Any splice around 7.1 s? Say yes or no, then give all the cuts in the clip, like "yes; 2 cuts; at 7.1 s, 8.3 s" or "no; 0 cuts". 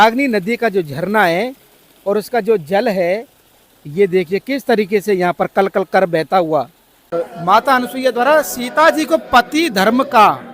yes; 1 cut; at 7.1 s